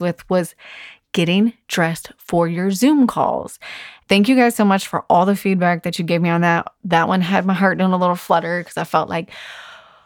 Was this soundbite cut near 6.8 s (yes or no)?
no